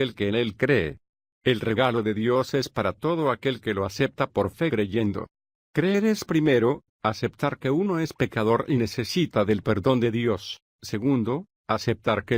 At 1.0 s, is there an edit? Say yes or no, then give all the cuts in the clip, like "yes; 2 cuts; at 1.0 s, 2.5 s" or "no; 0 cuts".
no; 0 cuts